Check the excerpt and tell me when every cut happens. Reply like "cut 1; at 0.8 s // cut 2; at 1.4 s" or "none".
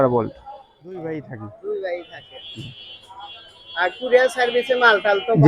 cut 1; at 1.0 s